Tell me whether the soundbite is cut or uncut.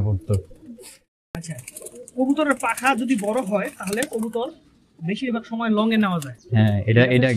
cut